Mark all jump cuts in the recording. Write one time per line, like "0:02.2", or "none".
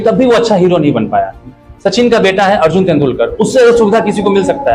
none